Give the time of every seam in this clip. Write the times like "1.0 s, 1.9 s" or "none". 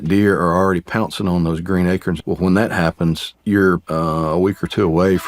2.2 s, 3.3 s, 3.8 s